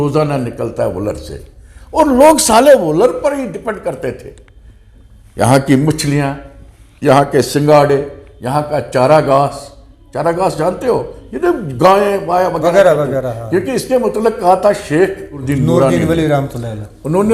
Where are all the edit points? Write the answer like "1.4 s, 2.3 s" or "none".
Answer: 15.4 s

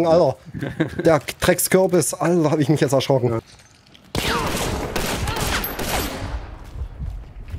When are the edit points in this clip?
3.5 s

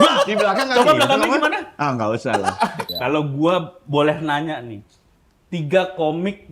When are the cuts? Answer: 2.8 s

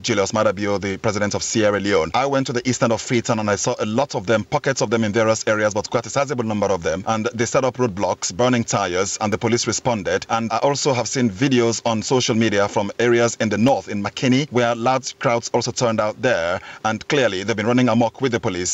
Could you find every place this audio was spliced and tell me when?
2.1 s, 7.0 s, 10.5 s, 14.5 s

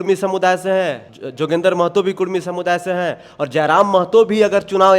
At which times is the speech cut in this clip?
none

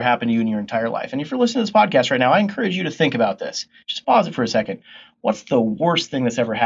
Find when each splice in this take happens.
none

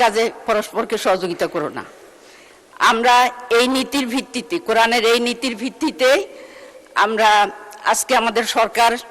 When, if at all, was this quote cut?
none

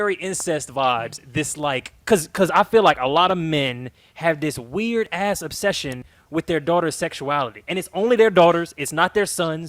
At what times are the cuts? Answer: none

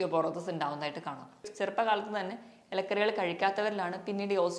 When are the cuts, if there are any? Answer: 1.5 s

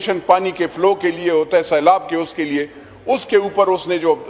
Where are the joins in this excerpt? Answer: none

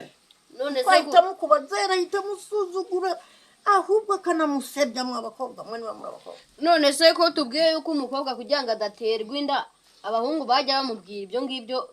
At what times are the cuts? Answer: none

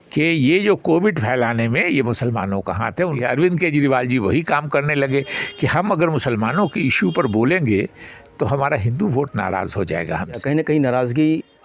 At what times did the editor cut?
3.2 s, 10.4 s

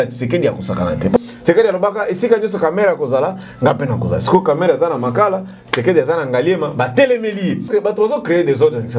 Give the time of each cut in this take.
1.2 s, 7.7 s

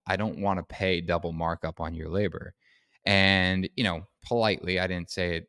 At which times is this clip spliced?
none

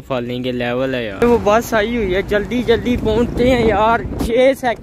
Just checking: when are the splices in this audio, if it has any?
1.2 s

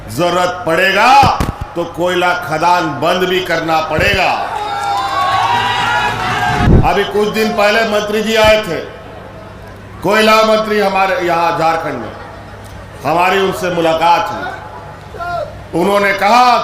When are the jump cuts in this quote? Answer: 6.7 s

